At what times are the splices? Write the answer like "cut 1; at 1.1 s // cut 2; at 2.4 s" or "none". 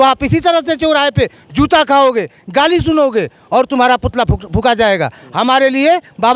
none